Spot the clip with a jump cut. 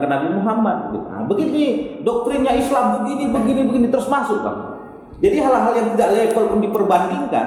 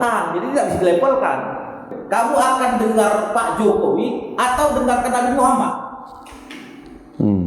second; 1 cut; at 1.9 s

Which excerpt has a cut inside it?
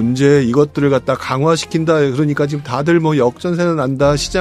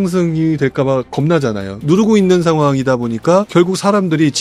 second; 1 cut; at 1.7 s

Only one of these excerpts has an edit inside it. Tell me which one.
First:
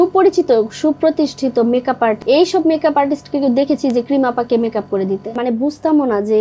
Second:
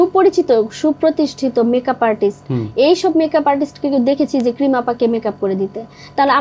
first; 2 cuts; at 2.2 s, 5.4 s

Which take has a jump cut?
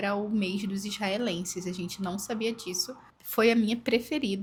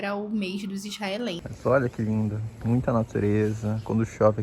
second; 1 cut; at 1.5 s

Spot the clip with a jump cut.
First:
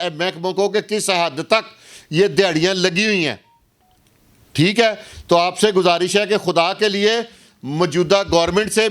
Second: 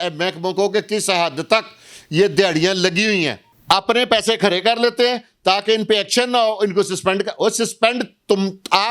second; 1 cut; at 3.5 s

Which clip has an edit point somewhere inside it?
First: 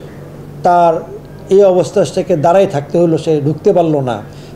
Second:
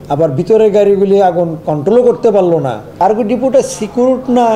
second; 1 cut; at 2.8 s

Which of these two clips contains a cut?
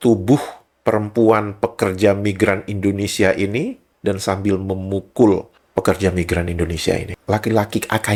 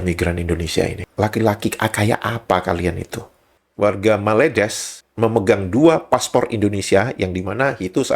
second; 1 cut; at 3.6 s

